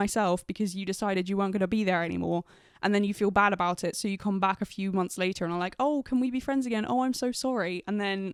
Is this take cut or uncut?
uncut